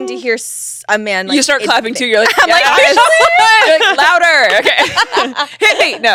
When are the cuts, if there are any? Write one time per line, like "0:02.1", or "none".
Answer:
none